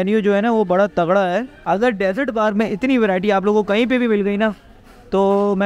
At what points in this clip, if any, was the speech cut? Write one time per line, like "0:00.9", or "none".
0:01.5